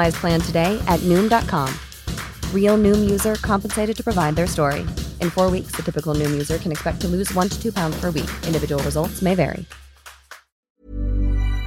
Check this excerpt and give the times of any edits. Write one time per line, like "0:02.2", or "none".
0:10.6